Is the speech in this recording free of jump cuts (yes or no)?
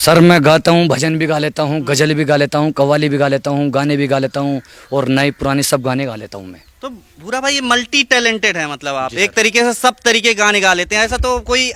yes